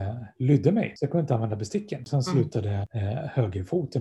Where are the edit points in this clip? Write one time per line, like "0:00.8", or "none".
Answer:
0:00.9
0:02.1
0:02.9